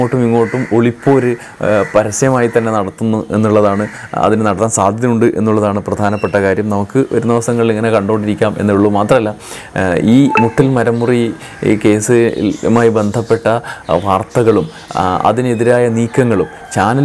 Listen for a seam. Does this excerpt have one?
no; 0 cuts

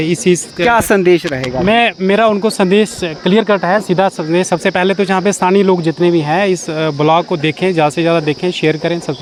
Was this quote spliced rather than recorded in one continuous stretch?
no; 0 cuts

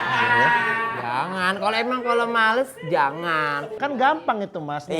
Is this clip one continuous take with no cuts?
yes; 0 cuts

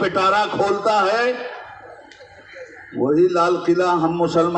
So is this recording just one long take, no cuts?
yes; 0 cuts

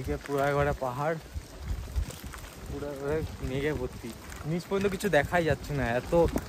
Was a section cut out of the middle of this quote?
no; 0 cuts

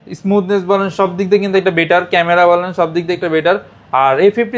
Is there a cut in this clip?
no; 0 cuts

